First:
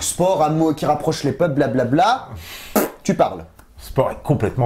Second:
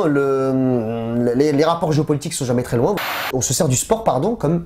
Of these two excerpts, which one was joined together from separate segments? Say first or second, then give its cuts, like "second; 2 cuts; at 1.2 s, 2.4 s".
second; 1 cut; at 3.0 s